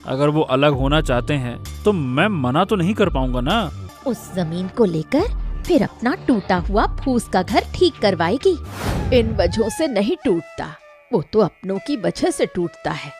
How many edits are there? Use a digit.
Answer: 2